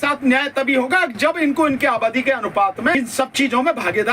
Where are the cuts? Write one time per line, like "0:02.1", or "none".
0:03.0